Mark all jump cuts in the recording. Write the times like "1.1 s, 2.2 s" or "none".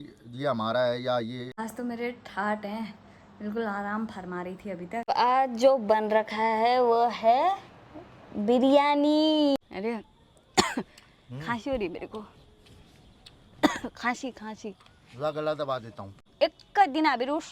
1.5 s, 5.1 s, 9.6 s, 16.3 s